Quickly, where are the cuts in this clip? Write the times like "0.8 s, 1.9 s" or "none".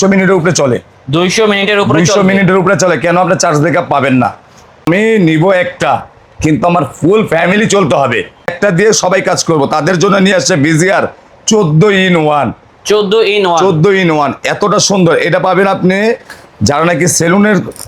4.8 s, 8.5 s